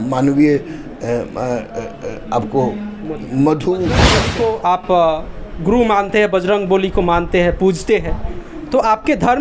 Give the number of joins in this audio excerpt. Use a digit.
1